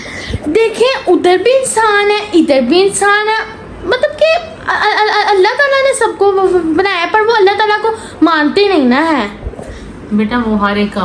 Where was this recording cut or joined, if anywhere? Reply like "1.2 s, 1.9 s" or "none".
none